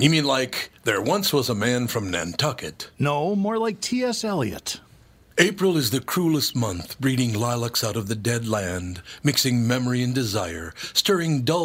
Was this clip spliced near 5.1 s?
no; 0 cuts

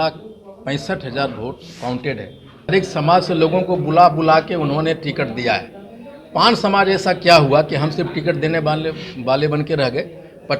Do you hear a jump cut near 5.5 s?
no; 1 cut; at 2.7 s

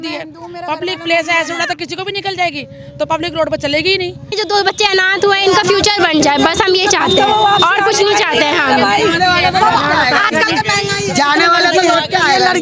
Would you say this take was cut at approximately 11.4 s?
no; 1 cut; at 4.2 s

